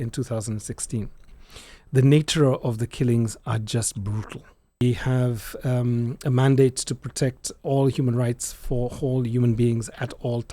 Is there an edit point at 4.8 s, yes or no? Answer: yes